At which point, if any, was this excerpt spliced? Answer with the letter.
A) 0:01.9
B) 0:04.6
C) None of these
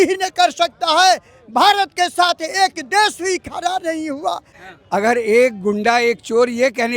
B